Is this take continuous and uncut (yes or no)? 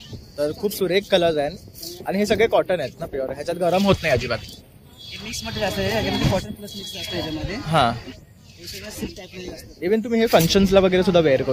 yes